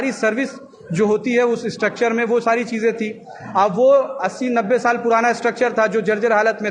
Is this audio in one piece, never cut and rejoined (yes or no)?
yes